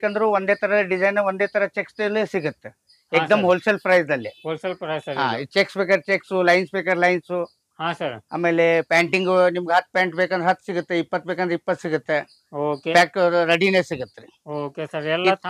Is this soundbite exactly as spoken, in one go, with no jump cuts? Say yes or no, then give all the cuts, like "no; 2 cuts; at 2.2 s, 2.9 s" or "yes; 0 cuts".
yes; 0 cuts